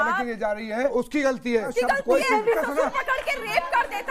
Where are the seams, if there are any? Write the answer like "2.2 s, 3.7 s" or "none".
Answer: 0.9 s, 1.7 s, 2.6 s